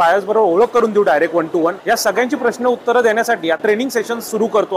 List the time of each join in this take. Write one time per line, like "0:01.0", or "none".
0:01.8
0:03.7